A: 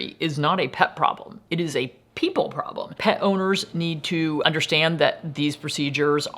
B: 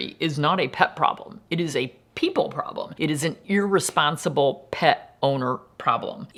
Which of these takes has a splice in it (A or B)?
A